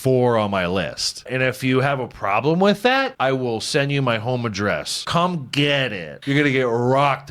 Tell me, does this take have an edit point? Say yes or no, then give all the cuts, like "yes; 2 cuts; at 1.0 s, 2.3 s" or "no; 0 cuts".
yes; 4 cuts; at 1.3 s, 3.1 s, 5.0 s, 6.1 s